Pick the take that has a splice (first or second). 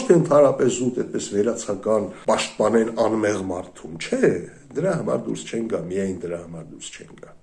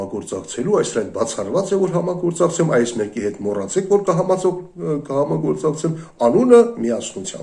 first